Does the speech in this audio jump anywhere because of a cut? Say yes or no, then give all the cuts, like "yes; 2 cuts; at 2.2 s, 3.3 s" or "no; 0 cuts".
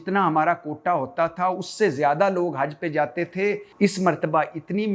yes; 1 cut; at 3.7 s